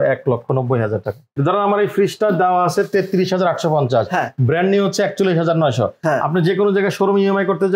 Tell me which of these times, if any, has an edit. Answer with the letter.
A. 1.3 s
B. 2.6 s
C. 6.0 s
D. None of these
A